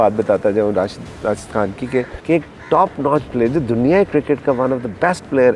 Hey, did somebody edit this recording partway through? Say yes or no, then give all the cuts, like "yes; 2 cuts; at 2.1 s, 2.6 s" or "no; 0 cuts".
yes; 1 cut; at 2.2 s